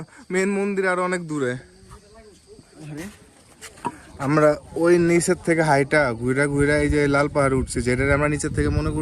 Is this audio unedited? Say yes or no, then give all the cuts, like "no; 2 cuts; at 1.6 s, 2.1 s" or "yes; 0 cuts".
no; 1 cut; at 2.8 s